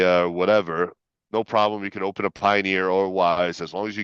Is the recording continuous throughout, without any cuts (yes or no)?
yes